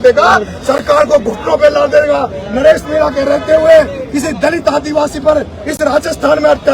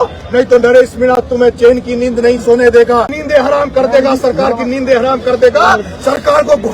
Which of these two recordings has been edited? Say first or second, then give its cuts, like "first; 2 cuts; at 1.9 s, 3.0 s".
second; 1 cut; at 3.2 s